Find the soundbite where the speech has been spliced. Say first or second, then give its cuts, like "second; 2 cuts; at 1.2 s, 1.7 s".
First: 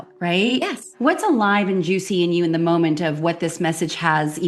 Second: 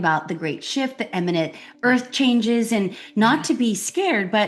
first; 1 cut; at 0.9 s